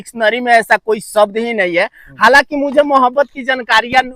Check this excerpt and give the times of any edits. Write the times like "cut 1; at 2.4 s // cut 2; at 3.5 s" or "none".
none